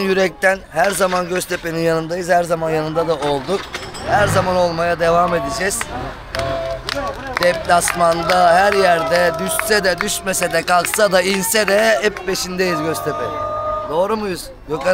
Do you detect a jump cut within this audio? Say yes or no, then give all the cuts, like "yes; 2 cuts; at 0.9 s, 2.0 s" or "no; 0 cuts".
no; 0 cuts